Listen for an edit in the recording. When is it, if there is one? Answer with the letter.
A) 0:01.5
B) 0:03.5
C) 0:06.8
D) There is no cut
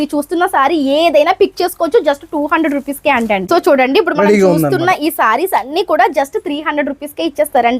B